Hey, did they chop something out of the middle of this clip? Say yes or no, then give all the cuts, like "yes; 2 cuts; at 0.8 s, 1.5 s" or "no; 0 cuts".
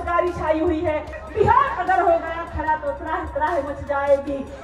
yes; 1 cut; at 1.2 s